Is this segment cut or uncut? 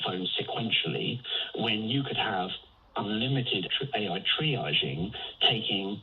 cut